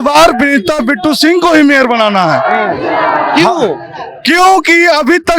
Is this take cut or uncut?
uncut